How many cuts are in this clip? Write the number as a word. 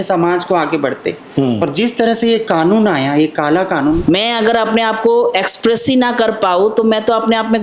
one